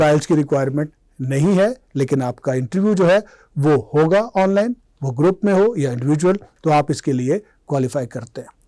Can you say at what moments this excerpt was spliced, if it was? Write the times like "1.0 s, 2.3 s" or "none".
none